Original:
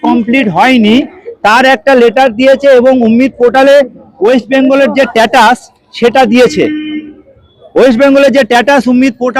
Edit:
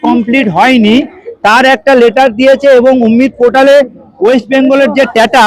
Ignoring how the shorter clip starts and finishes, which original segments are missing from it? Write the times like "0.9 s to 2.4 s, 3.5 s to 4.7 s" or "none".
none